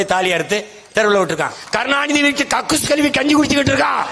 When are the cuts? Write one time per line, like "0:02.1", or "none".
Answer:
0:01.6